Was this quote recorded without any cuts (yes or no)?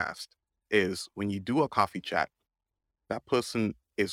no